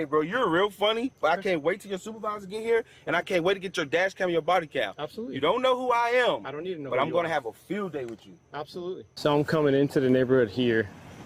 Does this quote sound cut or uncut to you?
uncut